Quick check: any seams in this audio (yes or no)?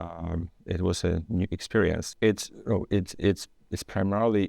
yes